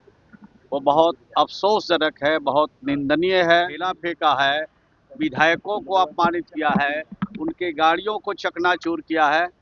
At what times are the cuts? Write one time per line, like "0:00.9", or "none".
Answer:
0:03.8